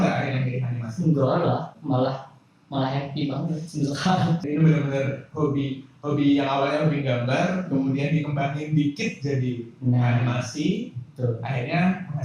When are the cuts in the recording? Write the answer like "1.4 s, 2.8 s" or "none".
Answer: 1.7 s